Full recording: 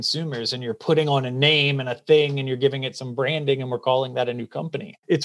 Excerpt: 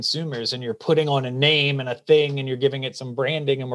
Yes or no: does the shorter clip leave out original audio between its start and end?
no